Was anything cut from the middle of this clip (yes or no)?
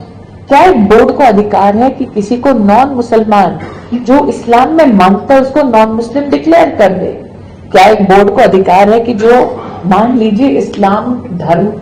no